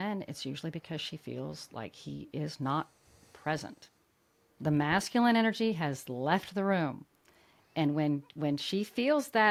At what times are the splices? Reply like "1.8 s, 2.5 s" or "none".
none